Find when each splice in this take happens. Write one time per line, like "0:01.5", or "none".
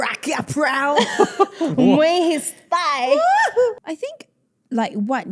none